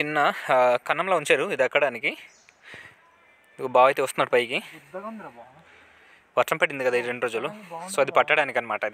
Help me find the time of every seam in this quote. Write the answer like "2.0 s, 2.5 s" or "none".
none

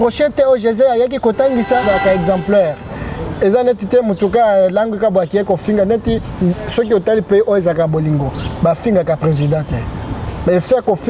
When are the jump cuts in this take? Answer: 1.8 s

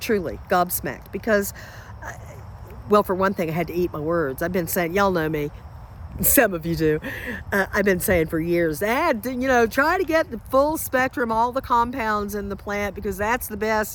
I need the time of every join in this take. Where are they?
none

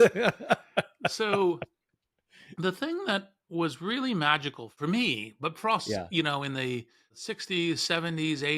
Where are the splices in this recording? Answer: 4.6 s, 7.3 s

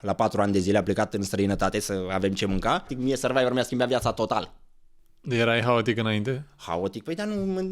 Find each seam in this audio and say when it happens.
2.9 s

